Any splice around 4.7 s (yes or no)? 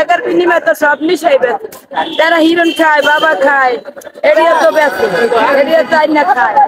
no